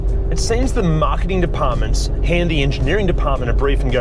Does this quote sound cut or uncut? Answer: uncut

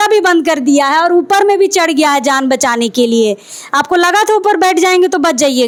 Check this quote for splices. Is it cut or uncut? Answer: uncut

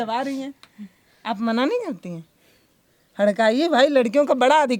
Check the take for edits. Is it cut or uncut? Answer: uncut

